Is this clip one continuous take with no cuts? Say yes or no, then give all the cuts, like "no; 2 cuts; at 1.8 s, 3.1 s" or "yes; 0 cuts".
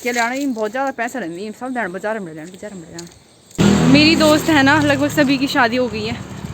no; 1 cut; at 3.5 s